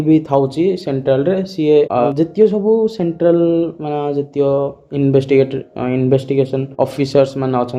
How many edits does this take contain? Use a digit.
0